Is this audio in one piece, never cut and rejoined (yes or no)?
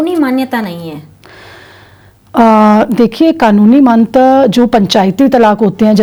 yes